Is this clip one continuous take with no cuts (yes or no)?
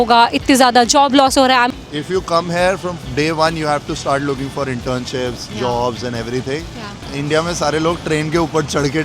no